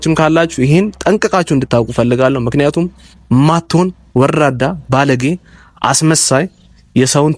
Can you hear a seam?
no; 0 cuts

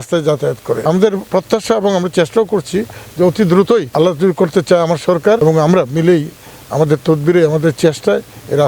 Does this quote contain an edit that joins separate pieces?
yes; 3 cuts; at 1.1 s, 3.9 s, 5.4 s

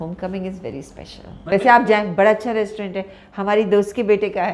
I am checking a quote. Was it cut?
yes; 1 cut; at 1.5 s

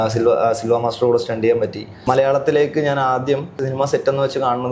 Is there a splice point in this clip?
yes; 2 cuts; at 1.9 s, 3.6 s

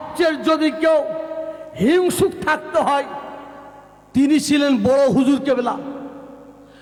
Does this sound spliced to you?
no; 0 cuts

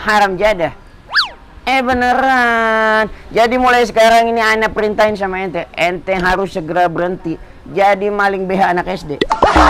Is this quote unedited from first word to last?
yes; 0 cuts

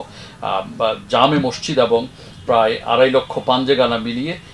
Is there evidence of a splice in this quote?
no; 0 cuts

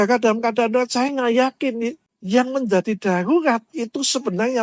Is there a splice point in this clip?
yes; 1 cut; at 2.1 s

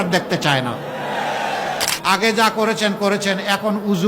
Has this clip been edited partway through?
yes; 1 cut; at 1.9 s

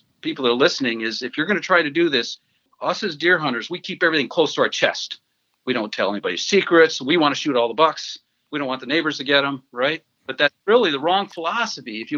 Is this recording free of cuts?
no; 2 cuts; at 2.7 s, 10.2 s

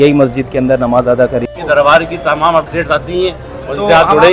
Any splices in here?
yes; 1 cut; at 1.6 s

